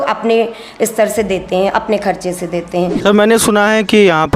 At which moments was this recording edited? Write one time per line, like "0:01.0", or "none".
0:03.0